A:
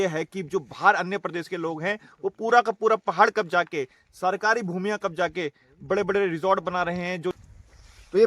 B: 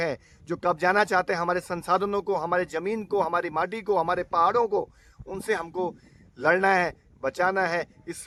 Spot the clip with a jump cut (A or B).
A